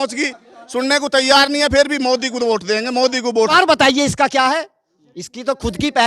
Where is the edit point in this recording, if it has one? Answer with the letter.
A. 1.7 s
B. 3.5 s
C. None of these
B